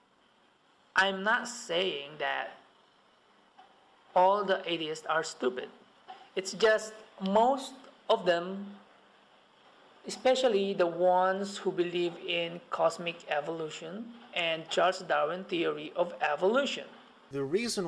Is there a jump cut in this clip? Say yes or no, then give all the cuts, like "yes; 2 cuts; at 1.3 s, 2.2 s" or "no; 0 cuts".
yes; 1 cut; at 12.2 s